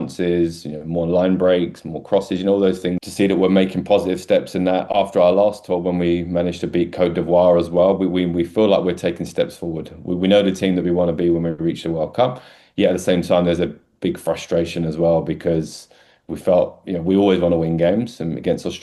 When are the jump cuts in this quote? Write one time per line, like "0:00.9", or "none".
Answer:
0:03.0